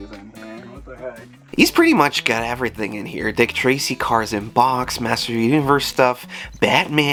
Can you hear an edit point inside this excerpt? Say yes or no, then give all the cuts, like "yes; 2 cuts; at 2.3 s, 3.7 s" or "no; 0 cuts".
no; 0 cuts